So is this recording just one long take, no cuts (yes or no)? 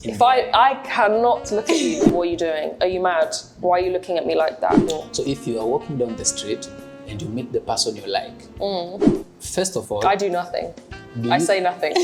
no